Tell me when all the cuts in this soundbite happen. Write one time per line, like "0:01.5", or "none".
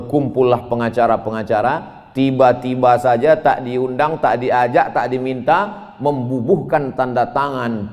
none